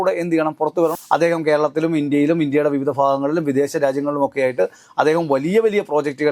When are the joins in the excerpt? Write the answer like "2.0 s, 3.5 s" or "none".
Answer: 0.9 s